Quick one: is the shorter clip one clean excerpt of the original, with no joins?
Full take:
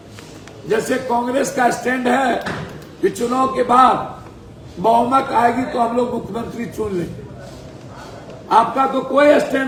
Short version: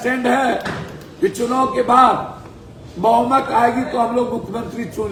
yes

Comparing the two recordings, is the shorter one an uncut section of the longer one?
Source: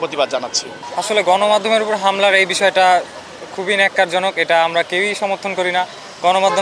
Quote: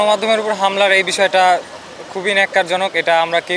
yes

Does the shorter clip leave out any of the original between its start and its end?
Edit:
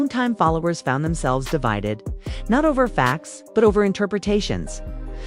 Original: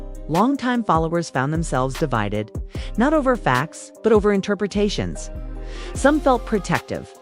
no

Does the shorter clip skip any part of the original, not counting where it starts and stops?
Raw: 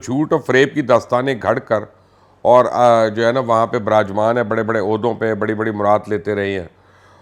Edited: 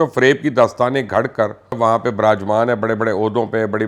yes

